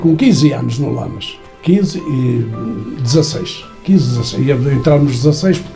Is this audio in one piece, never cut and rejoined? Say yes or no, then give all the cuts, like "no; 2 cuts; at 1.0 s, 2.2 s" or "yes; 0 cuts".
yes; 0 cuts